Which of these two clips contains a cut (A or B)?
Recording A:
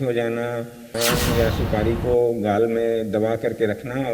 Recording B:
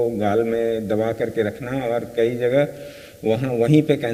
A